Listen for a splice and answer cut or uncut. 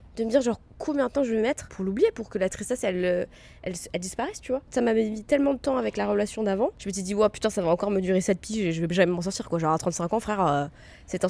cut